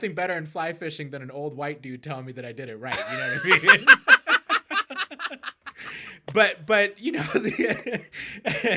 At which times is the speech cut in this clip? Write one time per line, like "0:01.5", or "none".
none